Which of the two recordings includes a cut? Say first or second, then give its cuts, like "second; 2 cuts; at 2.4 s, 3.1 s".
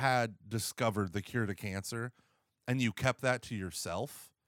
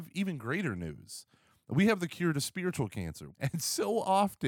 second; 1 cut; at 3.2 s